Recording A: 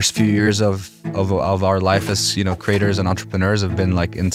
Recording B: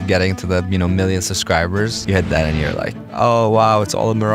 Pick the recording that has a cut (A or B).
B